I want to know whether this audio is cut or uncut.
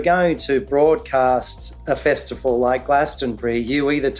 uncut